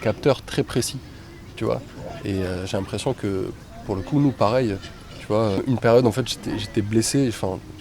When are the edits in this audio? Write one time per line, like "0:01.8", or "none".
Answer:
none